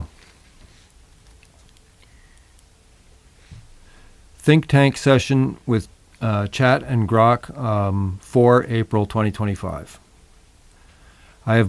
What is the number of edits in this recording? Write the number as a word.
zero